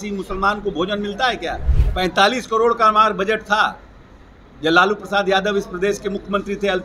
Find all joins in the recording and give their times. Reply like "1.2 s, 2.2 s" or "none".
1.8 s